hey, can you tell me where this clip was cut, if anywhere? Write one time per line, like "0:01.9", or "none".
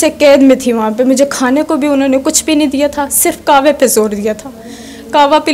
none